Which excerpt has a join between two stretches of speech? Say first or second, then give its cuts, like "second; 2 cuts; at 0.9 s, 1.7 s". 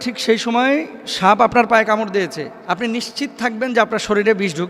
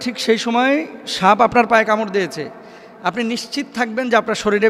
first; 1 cut; at 2.5 s